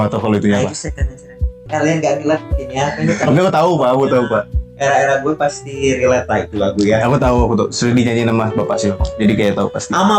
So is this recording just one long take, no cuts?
no; 1 cut; at 1.6 s

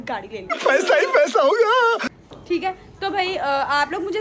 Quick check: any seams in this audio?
no; 0 cuts

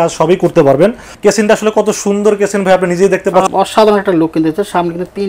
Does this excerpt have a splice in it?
yes; 2 cuts; at 1.1 s, 3.5 s

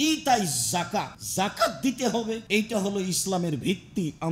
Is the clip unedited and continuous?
no; 2 cuts; at 1.2 s, 2.4 s

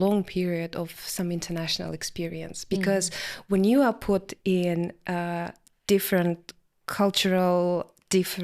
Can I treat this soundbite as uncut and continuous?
yes; 0 cuts

